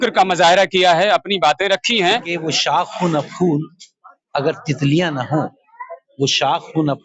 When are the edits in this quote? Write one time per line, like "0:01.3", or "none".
0:02.2